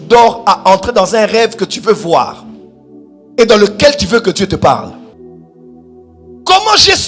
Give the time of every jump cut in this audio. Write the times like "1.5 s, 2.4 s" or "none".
5.1 s